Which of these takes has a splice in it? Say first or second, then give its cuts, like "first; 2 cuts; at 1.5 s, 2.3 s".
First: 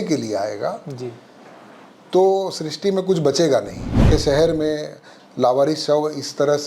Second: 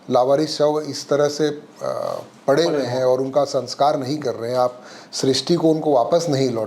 first; 1 cut; at 4.1 s